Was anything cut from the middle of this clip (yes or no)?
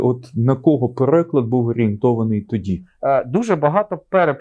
yes